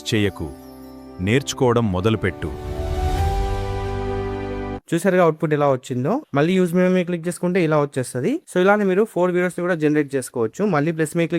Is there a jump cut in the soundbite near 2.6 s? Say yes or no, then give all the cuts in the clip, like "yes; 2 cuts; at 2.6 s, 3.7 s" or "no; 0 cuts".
no; 0 cuts